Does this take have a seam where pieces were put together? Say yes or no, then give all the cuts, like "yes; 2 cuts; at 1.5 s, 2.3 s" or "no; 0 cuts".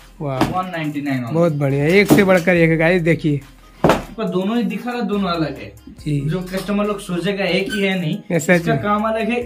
yes; 1 cut; at 4.1 s